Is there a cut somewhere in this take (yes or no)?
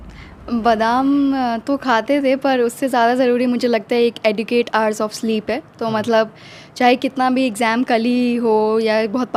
no